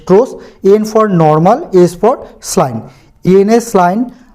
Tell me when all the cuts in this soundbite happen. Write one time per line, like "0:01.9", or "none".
0:03.2